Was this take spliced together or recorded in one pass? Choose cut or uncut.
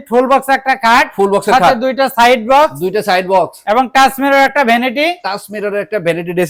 uncut